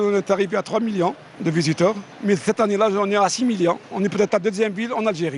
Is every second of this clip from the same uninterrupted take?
yes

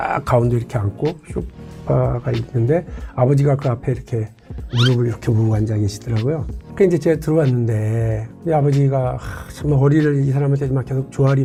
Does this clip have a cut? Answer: no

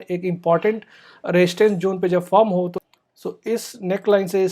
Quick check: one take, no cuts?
no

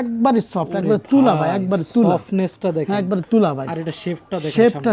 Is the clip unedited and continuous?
yes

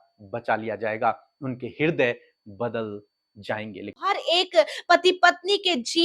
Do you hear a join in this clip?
yes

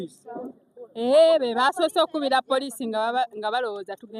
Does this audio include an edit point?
no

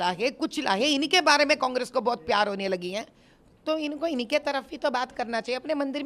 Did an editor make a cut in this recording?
no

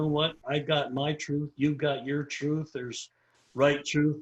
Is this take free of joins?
yes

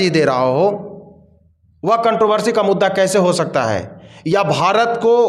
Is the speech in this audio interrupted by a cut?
no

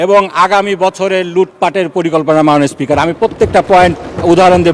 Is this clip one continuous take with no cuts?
yes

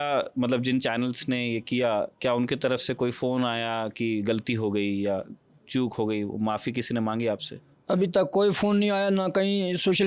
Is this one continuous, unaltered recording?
yes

